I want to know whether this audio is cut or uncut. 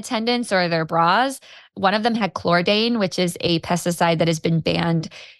cut